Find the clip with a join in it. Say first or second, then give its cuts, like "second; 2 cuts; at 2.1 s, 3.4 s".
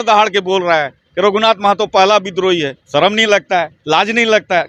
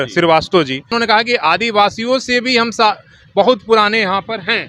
second; 1 cut; at 0.9 s